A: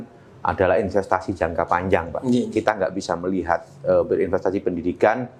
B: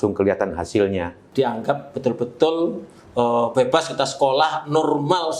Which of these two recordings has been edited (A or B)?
B